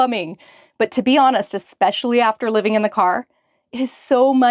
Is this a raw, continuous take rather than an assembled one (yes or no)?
yes